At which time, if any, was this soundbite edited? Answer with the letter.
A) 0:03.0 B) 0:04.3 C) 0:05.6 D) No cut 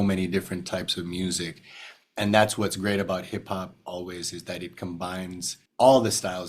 C